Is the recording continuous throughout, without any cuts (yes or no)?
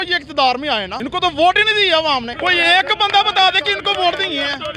no